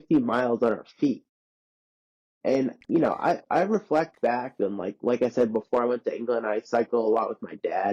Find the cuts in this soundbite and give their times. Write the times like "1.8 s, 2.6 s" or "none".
none